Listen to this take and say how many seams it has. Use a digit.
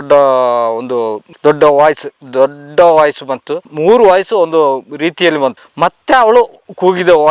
1